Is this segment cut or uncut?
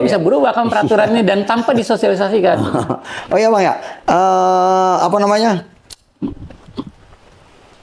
uncut